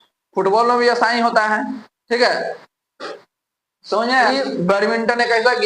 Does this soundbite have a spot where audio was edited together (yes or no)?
yes